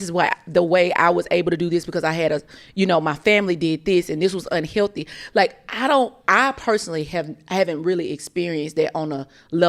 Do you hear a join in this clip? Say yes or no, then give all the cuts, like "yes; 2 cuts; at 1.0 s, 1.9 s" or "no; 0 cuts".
no; 0 cuts